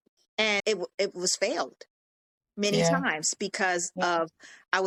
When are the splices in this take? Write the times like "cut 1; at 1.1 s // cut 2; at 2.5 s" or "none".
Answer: none